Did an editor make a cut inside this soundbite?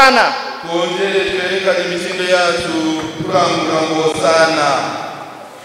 no; 0 cuts

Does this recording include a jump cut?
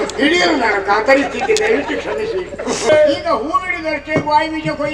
yes; 1 cut; at 2.9 s

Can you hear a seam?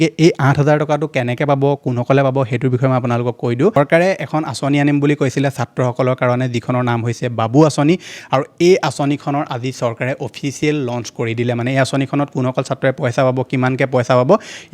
yes; 1 cut; at 3.8 s

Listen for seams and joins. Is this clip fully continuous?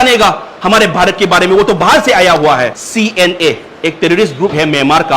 no; 1 cut; at 2.8 s

